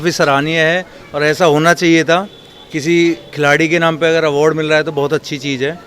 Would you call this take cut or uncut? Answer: uncut